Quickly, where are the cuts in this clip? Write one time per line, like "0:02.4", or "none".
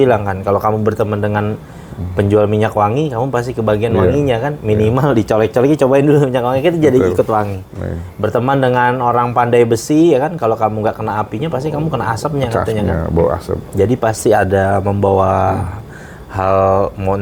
none